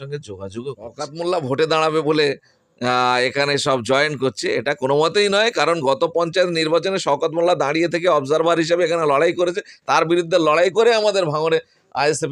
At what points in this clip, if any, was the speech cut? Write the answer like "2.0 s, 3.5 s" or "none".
1.1 s